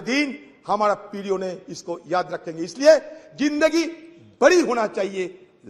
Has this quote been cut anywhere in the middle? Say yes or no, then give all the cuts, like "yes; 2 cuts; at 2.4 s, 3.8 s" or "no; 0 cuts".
no; 0 cuts